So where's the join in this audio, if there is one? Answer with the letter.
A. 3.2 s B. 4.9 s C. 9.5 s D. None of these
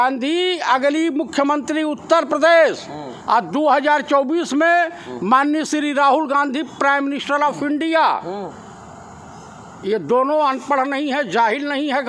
D